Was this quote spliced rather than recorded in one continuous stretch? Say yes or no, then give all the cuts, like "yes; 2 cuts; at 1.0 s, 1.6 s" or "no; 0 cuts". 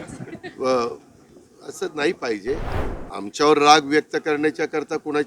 yes; 1 cut; at 2.7 s